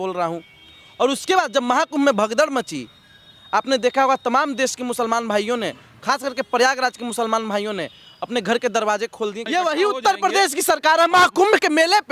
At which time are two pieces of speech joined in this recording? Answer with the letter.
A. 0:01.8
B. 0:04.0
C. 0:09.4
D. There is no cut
C